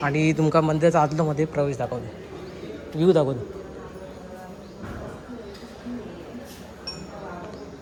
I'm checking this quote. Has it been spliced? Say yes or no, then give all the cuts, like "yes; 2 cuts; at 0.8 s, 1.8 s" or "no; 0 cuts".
no; 0 cuts